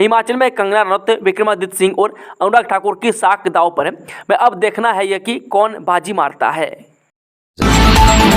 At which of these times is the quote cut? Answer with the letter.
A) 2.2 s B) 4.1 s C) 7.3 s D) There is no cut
C